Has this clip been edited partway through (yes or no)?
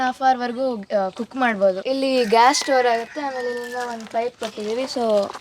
no